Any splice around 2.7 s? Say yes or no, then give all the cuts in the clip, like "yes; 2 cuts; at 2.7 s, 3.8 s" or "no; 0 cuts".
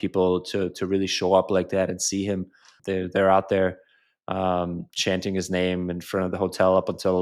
yes; 1 cut; at 2.7 s